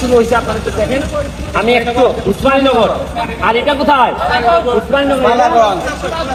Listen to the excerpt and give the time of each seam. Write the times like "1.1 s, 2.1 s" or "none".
none